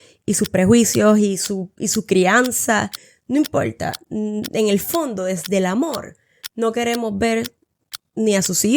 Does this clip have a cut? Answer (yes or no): no